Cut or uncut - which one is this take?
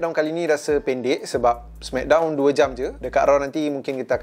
uncut